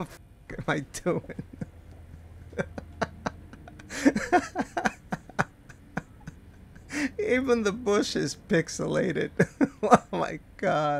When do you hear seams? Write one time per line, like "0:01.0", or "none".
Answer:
none